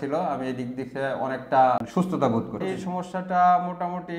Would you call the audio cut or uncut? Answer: cut